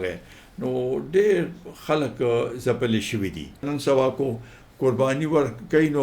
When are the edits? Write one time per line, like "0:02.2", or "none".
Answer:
0:03.7